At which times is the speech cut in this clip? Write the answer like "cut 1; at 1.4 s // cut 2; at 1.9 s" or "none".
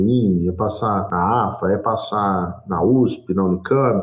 cut 1; at 1.1 s